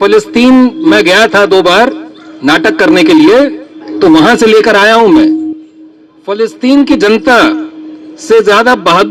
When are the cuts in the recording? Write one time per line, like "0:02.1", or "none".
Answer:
none